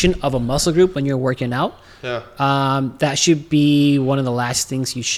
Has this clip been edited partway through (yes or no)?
no